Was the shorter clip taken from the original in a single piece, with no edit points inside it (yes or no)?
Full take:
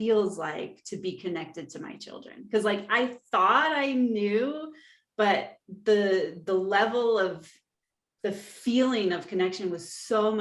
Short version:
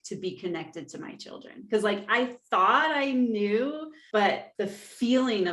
no